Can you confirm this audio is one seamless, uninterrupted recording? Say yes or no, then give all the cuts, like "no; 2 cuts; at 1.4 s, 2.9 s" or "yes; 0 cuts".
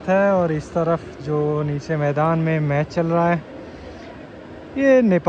yes; 0 cuts